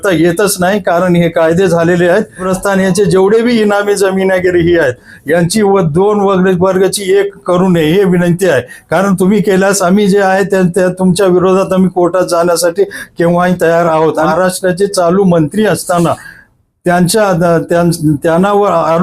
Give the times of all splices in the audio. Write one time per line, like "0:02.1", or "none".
0:02.4
0:14.3